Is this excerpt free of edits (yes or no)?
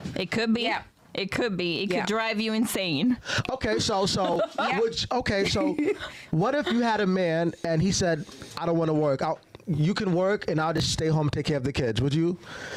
yes